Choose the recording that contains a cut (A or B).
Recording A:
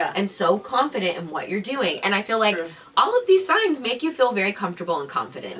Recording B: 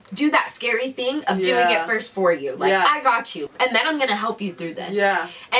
B